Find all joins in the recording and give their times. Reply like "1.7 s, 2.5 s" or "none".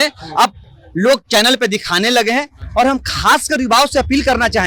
none